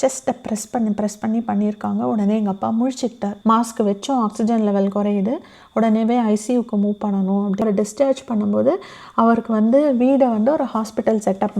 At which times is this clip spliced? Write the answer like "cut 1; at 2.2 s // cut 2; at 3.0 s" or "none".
cut 1; at 3.3 s // cut 2; at 7.6 s